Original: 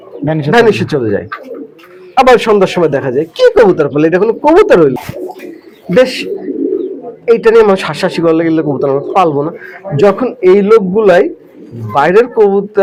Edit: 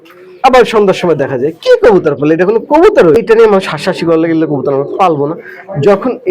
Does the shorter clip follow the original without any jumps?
no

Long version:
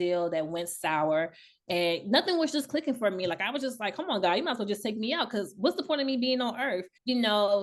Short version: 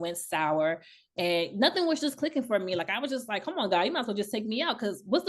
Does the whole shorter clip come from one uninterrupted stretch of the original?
yes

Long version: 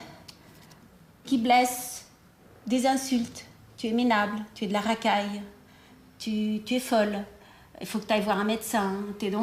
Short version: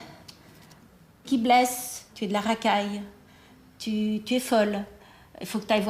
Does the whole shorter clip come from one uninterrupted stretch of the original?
no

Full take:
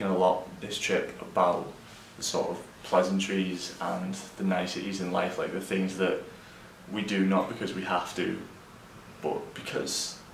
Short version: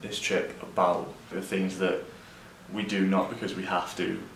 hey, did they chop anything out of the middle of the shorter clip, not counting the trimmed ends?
yes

